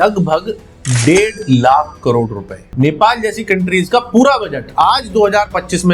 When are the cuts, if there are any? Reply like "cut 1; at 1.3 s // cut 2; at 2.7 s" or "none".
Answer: cut 1; at 2.7 s